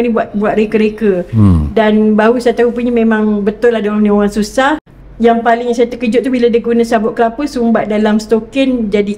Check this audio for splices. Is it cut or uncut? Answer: cut